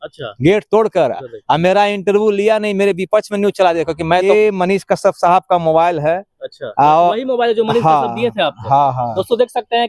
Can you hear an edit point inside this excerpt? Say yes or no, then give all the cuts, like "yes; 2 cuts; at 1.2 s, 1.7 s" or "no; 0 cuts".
yes; 1 cut; at 4.2 s